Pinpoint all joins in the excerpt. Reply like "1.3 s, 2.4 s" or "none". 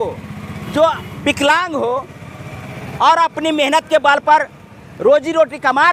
none